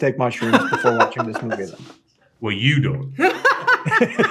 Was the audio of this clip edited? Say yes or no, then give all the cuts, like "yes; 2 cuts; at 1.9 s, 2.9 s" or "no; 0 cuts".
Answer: no; 0 cuts